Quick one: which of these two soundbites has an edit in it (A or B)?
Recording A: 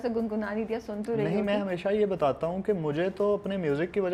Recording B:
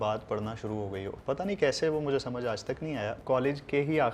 B